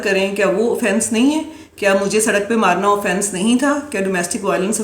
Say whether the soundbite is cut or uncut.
uncut